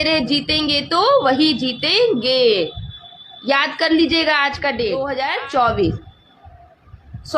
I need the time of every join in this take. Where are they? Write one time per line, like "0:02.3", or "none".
0:05.1